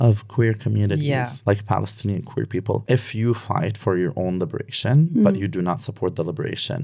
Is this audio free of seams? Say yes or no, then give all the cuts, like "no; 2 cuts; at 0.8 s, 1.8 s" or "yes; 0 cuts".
no; 2 cuts; at 1.3 s, 2.8 s